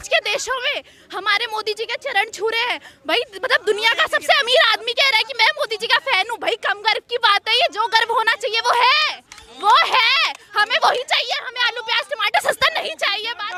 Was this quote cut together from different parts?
no; 0 cuts

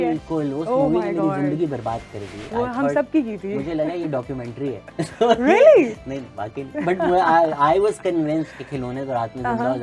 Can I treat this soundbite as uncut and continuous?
yes; 0 cuts

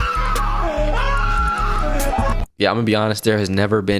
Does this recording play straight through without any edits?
yes; 0 cuts

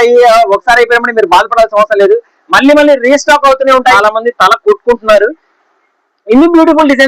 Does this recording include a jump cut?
yes; 1 cut; at 4.0 s

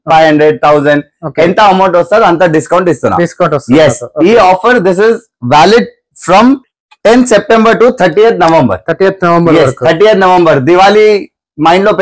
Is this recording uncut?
yes; 0 cuts

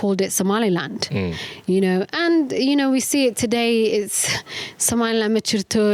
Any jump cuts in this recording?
no; 0 cuts

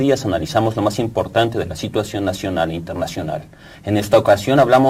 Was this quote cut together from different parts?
no; 0 cuts

